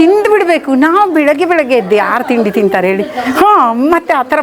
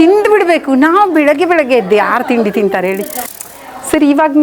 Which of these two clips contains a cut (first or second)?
second